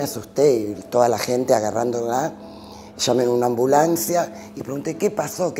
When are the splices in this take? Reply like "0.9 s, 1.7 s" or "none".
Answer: none